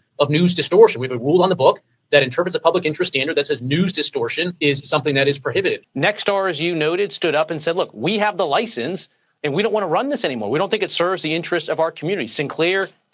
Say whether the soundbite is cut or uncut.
cut